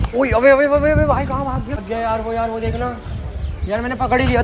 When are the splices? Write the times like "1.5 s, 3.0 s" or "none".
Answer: 1.8 s